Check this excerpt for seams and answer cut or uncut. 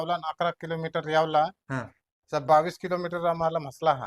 uncut